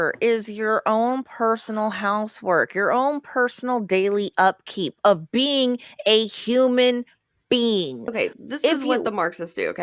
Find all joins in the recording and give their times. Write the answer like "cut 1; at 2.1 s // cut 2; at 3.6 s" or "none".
cut 1; at 8.4 s